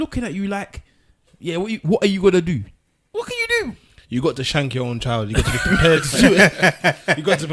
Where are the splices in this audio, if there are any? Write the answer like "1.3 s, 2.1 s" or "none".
none